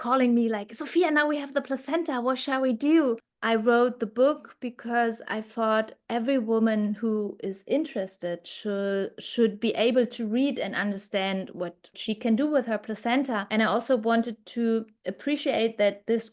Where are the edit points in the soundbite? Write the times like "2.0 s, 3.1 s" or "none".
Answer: 3.2 s